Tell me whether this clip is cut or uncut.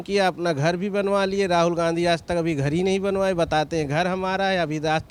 uncut